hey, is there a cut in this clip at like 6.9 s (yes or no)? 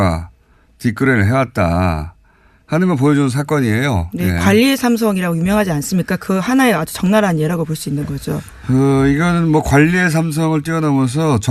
no